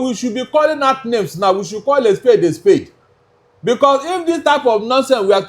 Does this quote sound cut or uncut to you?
uncut